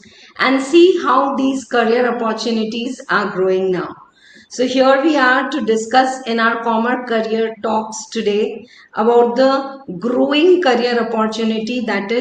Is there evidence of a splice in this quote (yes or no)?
no